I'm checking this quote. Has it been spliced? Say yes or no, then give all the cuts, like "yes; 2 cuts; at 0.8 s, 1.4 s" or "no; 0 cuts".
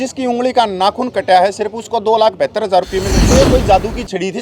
yes; 1 cut; at 3.2 s